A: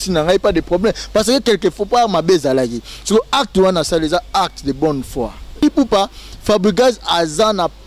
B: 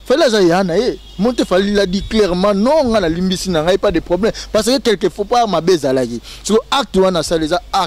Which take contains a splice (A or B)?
A